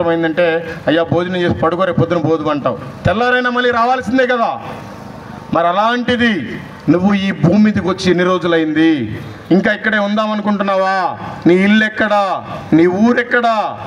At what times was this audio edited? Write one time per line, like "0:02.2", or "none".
none